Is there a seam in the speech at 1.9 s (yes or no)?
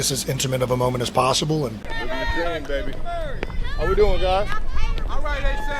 yes